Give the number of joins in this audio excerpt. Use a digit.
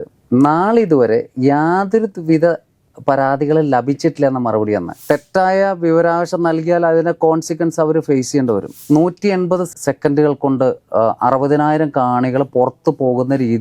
2